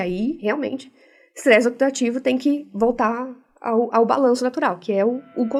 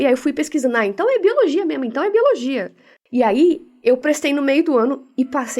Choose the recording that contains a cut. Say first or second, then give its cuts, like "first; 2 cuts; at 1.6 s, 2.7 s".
second; 2 cuts; at 2.9 s, 4.0 s